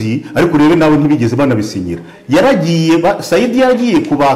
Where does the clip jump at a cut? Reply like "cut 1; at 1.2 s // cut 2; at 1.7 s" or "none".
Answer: none